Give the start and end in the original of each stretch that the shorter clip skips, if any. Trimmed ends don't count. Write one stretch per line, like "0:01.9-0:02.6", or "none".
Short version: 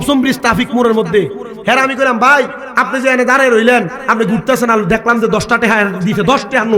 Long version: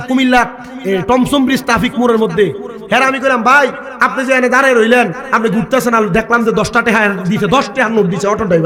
none